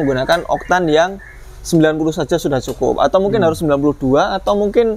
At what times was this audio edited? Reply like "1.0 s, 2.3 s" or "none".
none